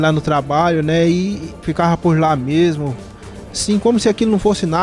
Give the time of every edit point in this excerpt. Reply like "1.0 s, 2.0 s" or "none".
1.6 s